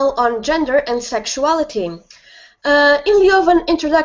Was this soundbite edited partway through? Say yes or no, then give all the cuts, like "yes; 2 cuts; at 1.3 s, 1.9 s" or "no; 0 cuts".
no; 0 cuts